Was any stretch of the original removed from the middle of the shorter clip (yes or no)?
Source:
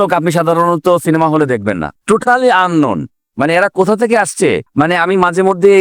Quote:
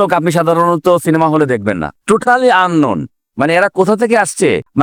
no